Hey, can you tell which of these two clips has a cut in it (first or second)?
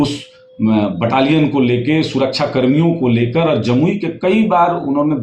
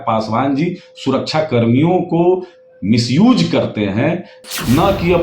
second